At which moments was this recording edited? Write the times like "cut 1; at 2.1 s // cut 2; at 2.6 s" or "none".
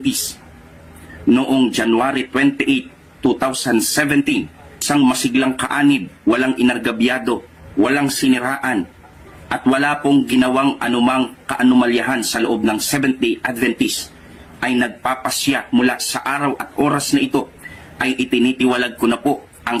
none

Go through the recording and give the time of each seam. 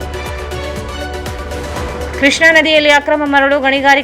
cut 1; at 2.1 s

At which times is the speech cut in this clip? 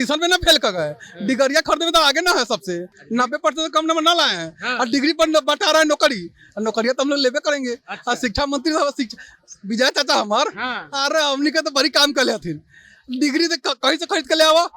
none

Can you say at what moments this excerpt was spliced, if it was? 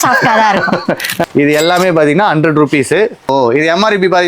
cut 1; at 1.1 s // cut 2; at 3.3 s

